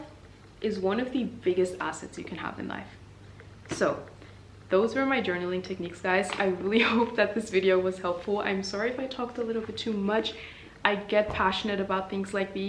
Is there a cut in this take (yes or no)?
no